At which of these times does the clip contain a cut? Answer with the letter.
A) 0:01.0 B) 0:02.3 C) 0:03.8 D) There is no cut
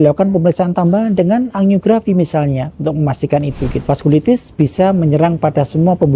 C